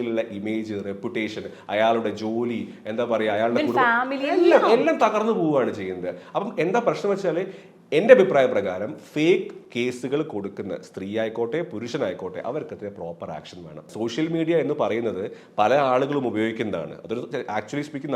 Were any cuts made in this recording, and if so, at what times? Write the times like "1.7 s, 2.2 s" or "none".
13.9 s